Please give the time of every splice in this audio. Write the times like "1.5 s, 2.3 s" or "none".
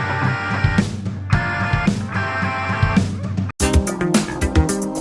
3.5 s